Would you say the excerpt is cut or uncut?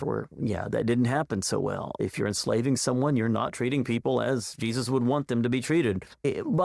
uncut